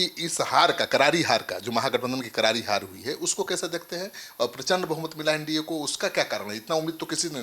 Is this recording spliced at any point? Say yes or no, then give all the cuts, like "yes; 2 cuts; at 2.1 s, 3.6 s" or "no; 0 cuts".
no; 0 cuts